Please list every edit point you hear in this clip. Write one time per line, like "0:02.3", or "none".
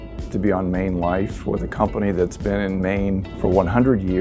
0:03.3